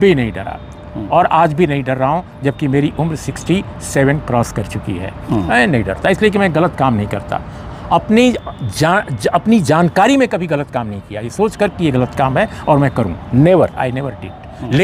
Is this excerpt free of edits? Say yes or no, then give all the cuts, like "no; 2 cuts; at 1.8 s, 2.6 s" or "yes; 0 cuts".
yes; 0 cuts